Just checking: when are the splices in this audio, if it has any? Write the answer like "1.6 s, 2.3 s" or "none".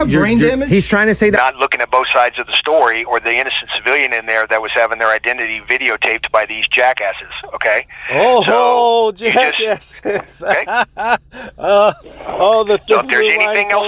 1.4 s